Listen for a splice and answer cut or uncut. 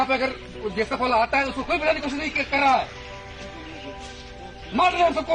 uncut